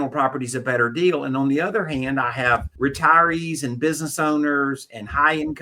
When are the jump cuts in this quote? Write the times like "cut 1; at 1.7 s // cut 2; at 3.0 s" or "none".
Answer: cut 1; at 2.7 s